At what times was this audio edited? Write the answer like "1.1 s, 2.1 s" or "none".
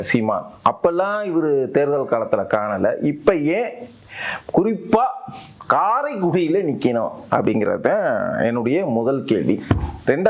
none